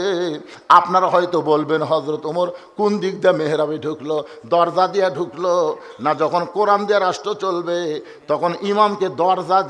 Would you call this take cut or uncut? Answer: uncut